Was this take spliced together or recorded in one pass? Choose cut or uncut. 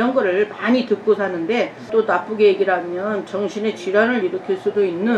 cut